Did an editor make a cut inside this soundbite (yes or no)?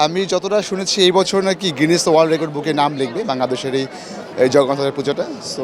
no